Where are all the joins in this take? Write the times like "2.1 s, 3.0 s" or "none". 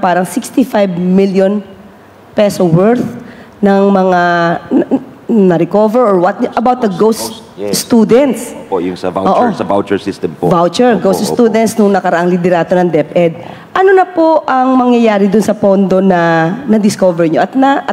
none